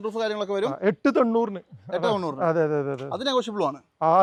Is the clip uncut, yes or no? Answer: yes